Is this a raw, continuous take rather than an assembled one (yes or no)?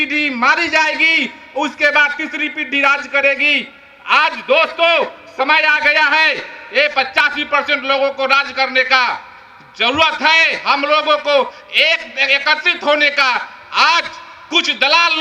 yes